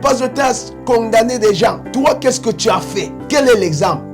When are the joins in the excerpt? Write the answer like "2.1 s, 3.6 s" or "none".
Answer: 1.8 s, 3.2 s